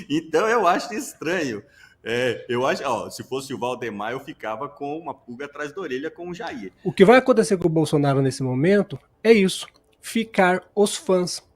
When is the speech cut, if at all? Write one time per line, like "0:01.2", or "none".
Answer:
0:06.7